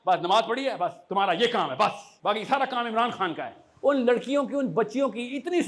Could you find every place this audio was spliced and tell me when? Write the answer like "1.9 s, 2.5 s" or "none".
2.1 s, 3.6 s